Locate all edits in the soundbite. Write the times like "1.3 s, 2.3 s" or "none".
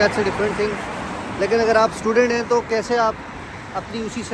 none